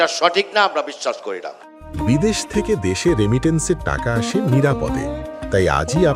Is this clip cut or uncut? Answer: uncut